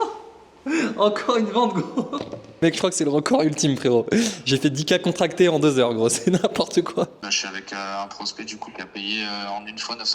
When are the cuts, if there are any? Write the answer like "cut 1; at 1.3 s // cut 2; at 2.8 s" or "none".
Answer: cut 1; at 2.6 s // cut 2; at 7.3 s